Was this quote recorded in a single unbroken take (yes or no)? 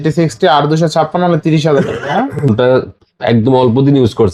no